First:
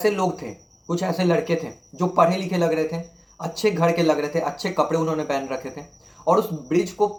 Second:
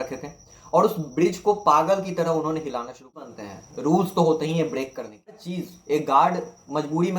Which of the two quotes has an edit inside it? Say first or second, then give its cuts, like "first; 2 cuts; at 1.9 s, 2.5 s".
second; 2 cuts; at 3.3 s, 5.5 s